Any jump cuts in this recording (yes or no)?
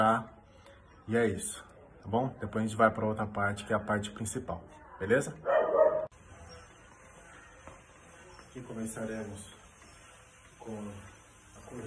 no